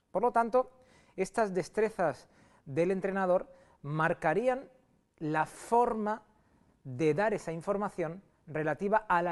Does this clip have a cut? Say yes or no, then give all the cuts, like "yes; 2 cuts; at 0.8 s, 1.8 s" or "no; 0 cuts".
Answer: no; 0 cuts